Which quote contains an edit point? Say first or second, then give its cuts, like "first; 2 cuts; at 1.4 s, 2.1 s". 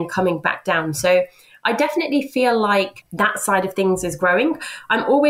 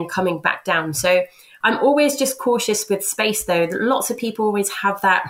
second; 1 cut; at 1.5 s